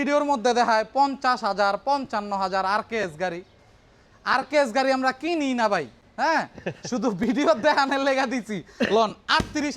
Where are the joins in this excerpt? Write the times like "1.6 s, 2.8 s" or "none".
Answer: none